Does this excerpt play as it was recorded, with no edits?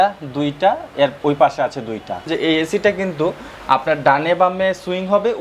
no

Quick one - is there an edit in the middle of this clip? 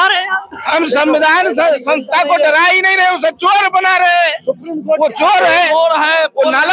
no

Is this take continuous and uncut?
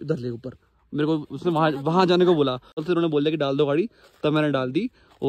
no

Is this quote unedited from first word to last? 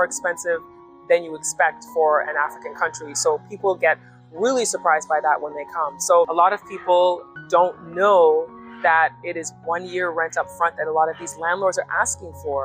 no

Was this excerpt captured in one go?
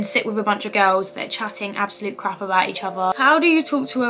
no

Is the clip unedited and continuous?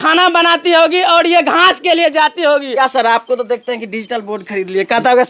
no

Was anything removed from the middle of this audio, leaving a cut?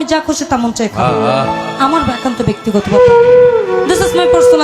no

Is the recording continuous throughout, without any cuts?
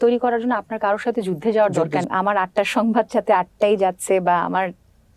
no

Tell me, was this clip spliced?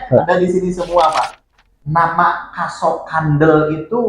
yes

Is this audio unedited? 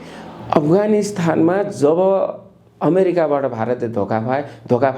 yes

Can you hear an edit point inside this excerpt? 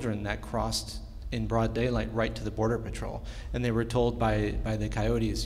no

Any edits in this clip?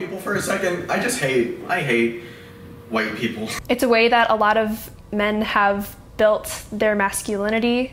yes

